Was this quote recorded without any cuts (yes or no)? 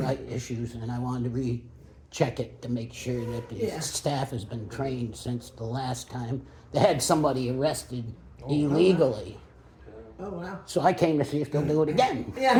yes